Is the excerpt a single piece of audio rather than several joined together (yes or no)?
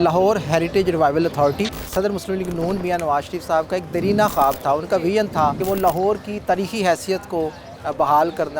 no